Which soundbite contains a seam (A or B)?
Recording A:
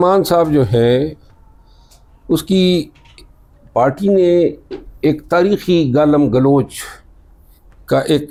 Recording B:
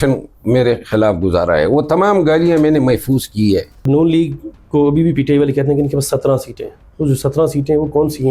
B